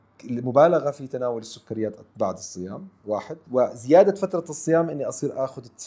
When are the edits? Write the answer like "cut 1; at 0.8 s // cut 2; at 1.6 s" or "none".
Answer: cut 1; at 3.4 s